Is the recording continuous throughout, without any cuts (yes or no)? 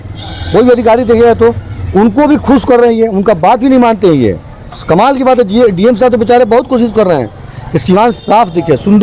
yes